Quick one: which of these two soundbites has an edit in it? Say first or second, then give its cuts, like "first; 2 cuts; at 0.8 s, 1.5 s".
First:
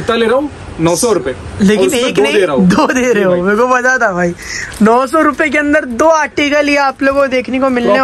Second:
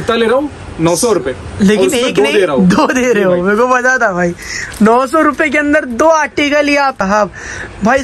second; 1 cut; at 7.0 s